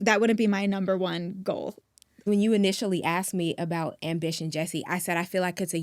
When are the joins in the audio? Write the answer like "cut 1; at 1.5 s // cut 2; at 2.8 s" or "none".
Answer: cut 1; at 2.1 s